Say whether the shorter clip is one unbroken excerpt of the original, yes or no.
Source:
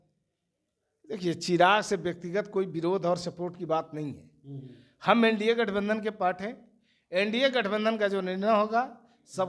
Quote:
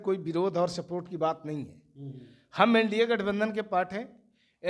yes